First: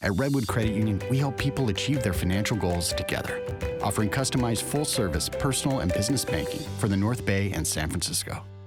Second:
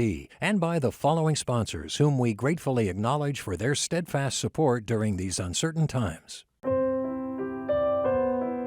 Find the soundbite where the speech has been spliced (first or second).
second